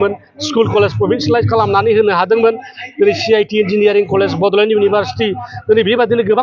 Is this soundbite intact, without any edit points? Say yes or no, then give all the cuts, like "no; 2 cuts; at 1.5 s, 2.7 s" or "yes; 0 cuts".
yes; 0 cuts